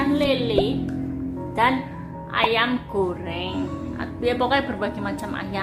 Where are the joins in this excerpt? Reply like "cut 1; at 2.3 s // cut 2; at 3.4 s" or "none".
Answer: none